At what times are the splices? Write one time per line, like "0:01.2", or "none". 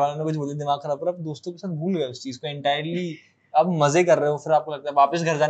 none